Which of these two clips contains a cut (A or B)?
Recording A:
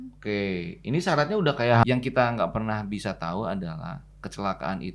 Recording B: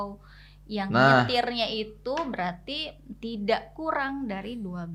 A